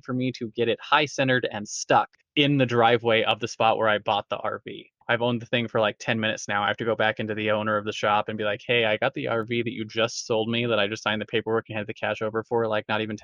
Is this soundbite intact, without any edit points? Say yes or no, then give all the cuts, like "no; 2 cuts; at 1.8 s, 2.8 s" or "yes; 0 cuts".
no; 2 cuts; at 2.2 s, 4.9 s